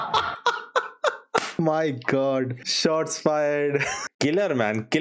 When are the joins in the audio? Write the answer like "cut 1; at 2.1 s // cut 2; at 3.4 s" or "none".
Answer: cut 1; at 1.5 s // cut 2; at 2.7 s // cut 3; at 4.0 s